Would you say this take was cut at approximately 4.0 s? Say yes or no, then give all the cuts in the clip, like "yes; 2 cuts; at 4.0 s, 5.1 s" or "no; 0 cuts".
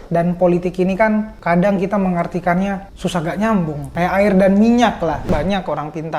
yes; 4 cuts; at 1.3 s, 2.9 s, 4.0 s, 5.3 s